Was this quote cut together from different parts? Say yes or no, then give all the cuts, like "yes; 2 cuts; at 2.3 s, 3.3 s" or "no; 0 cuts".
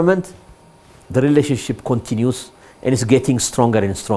no; 0 cuts